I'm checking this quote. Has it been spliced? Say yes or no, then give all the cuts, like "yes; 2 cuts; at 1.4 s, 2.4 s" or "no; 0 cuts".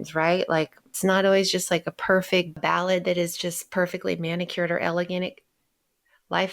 yes; 1 cut; at 2.5 s